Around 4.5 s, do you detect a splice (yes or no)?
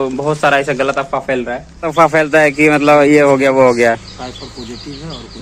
no